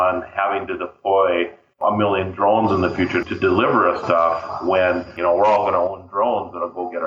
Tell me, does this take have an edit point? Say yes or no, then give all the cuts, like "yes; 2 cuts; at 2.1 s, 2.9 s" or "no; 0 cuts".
yes; 2 cuts; at 3.2 s, 5.1 s